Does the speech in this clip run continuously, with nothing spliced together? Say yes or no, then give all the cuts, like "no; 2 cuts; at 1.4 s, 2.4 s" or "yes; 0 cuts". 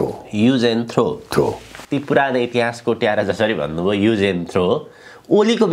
no; 1 cut; at 1.7 s